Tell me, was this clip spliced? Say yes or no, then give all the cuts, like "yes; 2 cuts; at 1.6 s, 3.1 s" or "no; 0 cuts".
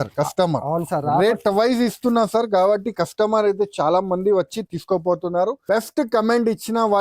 yes; 1 cut; at 5.6 s